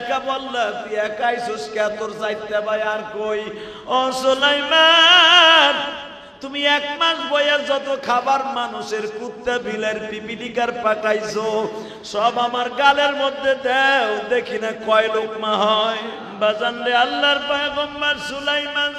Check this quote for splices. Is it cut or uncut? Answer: cut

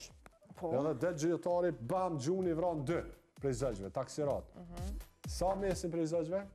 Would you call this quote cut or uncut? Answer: uncut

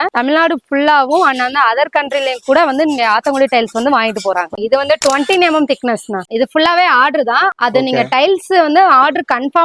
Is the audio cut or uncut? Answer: cut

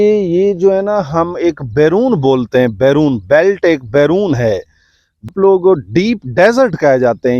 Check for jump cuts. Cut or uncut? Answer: cut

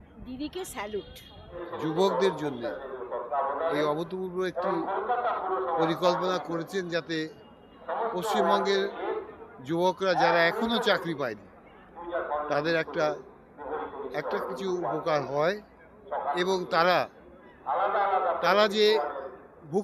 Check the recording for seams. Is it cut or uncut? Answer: cut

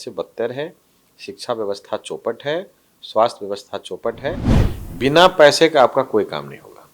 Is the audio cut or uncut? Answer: cut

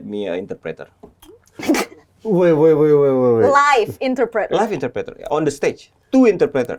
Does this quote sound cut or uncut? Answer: uncut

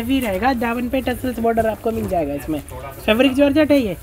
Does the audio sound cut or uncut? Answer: uncut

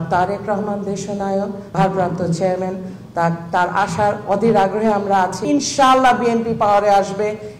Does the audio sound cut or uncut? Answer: cut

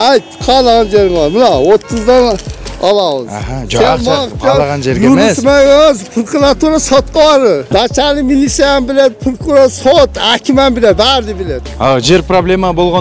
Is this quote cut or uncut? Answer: cut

